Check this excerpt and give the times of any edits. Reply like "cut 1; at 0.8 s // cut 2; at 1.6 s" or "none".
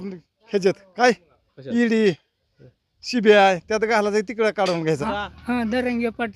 cut 1; at 5.0 s